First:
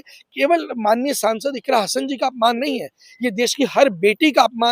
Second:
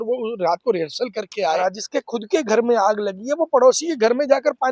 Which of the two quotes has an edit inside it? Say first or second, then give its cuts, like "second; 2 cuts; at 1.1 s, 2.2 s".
second; 1 cut; at 1.6 s